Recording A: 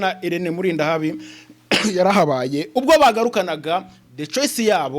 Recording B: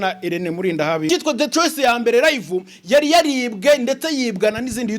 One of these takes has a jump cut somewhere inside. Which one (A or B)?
B